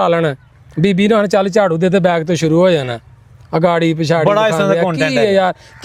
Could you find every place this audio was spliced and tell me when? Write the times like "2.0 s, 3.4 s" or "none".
none